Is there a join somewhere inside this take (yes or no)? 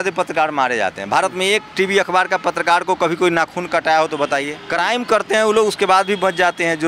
yes